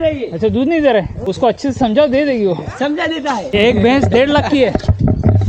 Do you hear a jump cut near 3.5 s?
yes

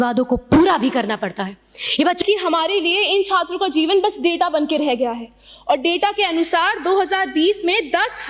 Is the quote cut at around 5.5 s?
no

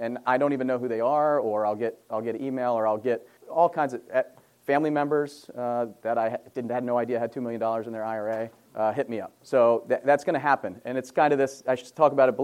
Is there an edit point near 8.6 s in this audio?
yes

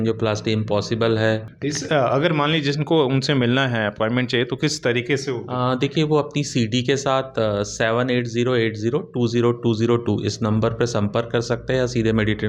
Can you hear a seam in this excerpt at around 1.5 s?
yes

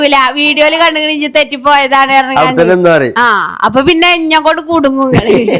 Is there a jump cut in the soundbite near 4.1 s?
no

